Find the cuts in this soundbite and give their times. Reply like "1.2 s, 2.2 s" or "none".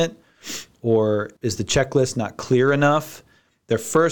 1.3 s